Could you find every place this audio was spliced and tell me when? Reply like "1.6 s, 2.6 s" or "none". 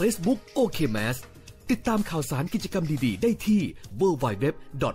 none